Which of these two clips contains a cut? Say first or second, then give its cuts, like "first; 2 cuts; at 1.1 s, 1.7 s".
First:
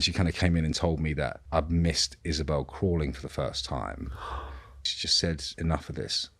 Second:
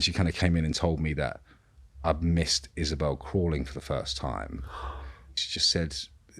first; 2 cuts; at 1.4 s, 5.5 s